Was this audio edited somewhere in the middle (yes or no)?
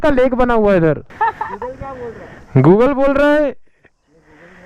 yes